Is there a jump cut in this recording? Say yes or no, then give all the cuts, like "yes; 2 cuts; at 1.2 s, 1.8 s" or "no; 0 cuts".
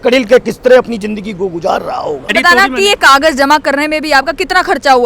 yes; 1 cut; at 2.3 s